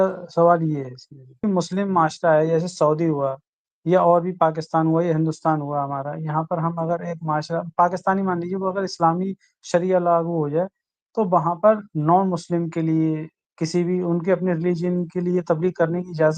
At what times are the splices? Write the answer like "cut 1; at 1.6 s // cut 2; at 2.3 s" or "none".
cut 1; at 1.4 s